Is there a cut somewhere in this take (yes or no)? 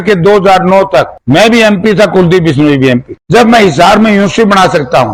no